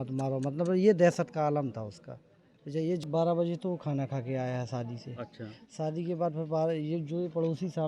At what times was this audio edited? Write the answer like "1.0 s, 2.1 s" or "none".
3.0 s